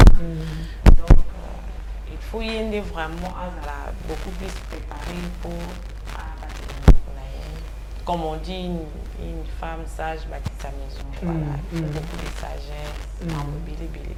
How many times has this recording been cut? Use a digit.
0